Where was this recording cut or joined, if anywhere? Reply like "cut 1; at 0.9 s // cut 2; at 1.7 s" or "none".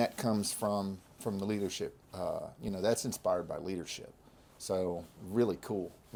none